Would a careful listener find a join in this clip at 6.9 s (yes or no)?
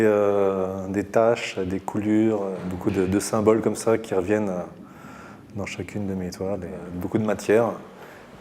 yes